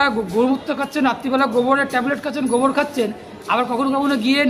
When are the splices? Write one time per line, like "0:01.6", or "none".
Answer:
none